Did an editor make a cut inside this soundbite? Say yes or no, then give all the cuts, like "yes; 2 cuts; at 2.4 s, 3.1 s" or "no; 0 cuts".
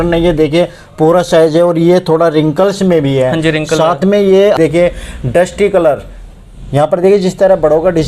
yes; 1 cut; at 4.6 s